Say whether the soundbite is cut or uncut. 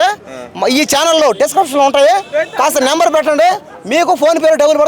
uncut